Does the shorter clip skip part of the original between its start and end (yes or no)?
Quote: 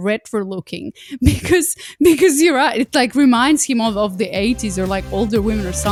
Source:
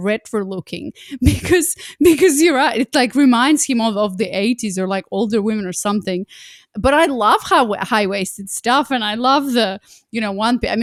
no